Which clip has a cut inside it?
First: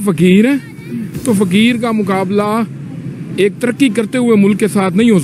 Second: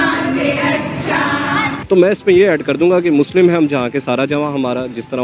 second; 1 cut; at 1.8 s

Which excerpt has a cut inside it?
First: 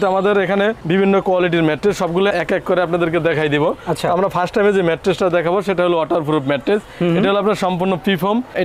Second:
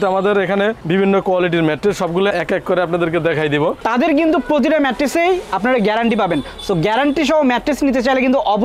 second; 1 cut; at 3.8 s

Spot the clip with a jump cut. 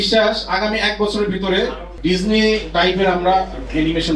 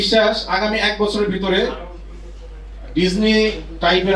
first; 2 cuts; at 1.9 s, 2.7 s

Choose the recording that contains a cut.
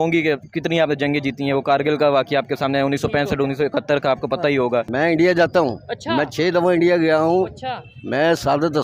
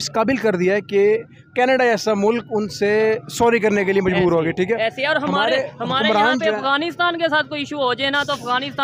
first; 1 cut; at 4.9 s

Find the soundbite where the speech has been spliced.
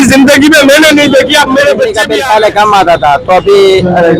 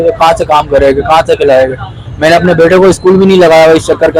first; 1 cut; at 2.0 s

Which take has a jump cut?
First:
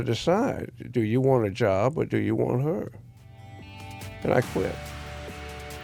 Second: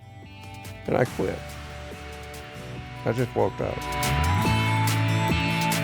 second; 1 cut; at 3.9 s

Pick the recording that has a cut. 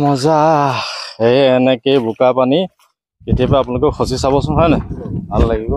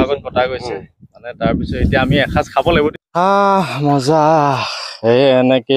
second; 1 cut; at 2.9 s

